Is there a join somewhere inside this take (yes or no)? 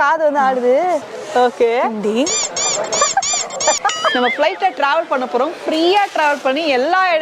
yes